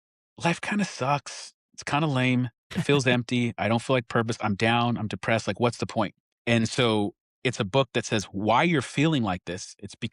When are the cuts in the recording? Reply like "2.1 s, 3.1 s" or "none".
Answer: 2.7 s, 6.3 s

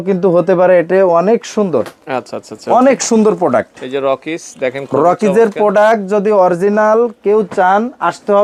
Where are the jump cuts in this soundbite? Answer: none

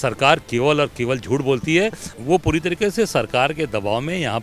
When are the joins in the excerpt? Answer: 2.1 s

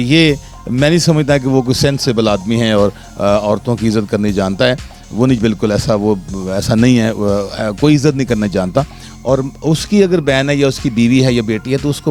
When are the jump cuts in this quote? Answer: none

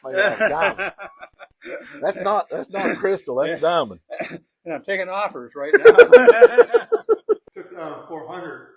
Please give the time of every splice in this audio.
7.4 s

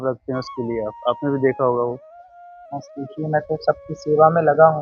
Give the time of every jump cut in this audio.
none

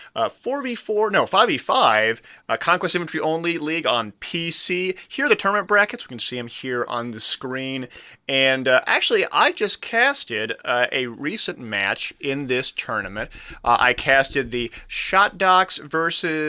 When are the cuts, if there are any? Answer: 3.2 s

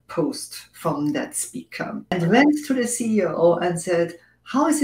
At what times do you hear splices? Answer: 2.1 s

